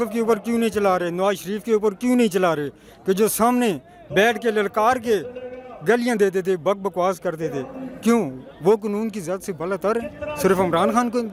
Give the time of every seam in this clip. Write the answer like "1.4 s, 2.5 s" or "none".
none